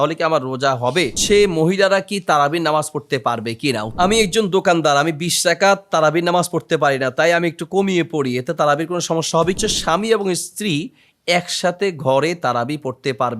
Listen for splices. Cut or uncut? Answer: cut